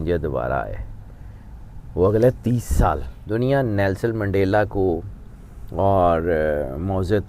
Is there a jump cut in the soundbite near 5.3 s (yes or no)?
no